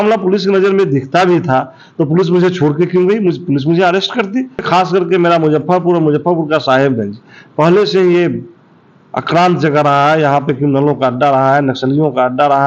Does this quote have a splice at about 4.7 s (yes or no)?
yes